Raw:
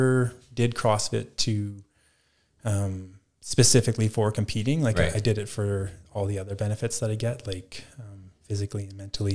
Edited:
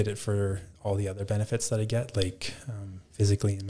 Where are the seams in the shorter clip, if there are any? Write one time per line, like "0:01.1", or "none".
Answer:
none